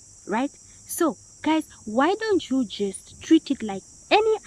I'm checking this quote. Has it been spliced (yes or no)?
no